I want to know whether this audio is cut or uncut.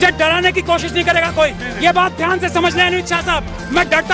uncut